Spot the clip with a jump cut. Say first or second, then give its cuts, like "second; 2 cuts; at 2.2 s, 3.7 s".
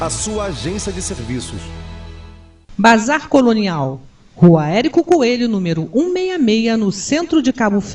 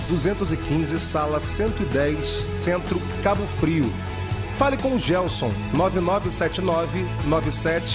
first; 1 cut; at 2.7 s